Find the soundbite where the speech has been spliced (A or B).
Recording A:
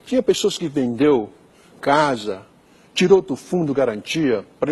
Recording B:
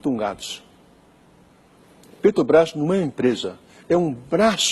A